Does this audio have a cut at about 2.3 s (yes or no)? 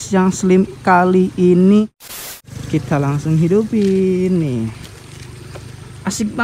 yes